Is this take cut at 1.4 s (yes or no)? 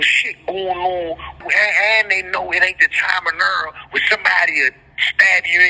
yes